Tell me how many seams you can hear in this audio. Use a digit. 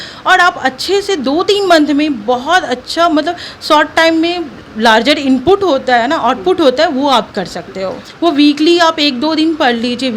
1